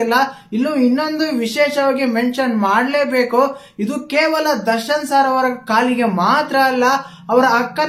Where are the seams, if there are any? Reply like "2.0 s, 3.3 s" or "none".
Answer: none